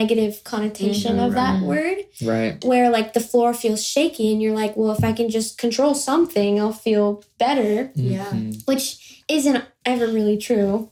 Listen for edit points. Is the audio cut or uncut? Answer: uncut